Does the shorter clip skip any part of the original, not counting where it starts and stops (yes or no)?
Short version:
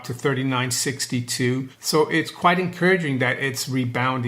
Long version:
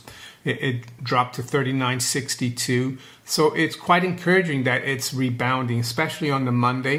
yes